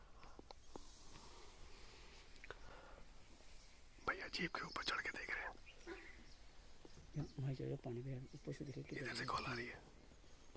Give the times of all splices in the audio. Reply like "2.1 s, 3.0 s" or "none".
none